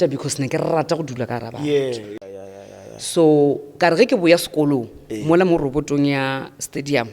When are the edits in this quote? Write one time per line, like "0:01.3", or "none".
0:02.1